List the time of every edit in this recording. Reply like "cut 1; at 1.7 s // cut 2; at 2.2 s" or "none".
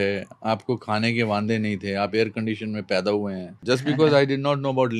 cut 1; at 3.5 s